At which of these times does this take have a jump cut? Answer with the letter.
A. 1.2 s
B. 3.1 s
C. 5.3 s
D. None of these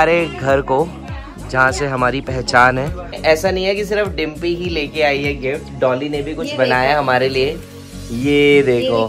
B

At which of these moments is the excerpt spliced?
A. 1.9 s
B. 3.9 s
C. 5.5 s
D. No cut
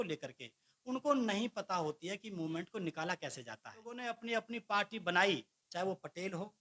B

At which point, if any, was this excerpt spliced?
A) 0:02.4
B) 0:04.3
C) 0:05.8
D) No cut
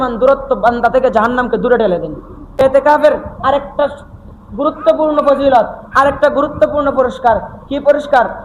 A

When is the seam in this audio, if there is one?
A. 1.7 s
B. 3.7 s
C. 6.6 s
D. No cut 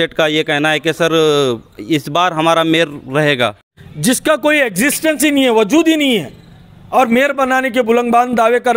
B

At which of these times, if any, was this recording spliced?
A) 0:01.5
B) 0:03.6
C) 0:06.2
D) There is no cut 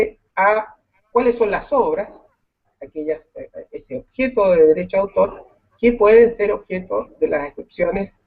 A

